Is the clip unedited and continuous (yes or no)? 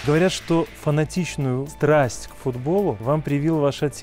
no